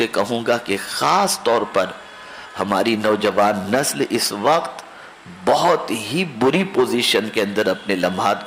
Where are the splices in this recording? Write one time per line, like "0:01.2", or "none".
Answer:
none